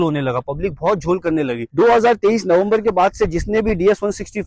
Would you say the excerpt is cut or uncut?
cut